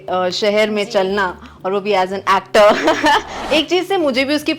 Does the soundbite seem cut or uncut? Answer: cut